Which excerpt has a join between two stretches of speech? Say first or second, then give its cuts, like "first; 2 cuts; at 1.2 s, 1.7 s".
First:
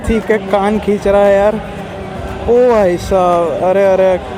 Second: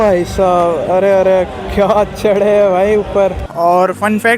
second; 1 cut; at 3.4 s